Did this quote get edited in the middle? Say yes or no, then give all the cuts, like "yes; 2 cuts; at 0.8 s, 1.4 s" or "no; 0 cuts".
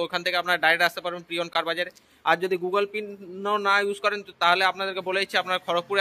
no; 0 cuts